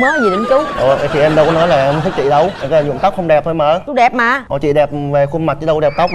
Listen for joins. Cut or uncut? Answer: uncut